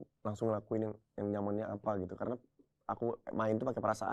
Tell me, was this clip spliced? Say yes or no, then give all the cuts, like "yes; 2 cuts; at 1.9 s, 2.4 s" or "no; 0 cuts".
no; 0 cuts